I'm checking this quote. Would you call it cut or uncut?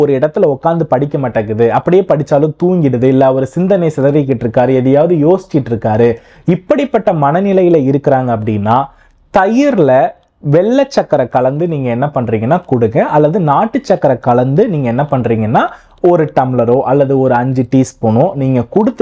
uncut